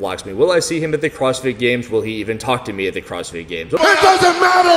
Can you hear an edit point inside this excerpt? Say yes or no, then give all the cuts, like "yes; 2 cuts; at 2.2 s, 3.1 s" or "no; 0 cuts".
yes; 1 cut; at 3.8 s